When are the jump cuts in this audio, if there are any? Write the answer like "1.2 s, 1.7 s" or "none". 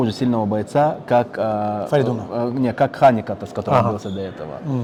none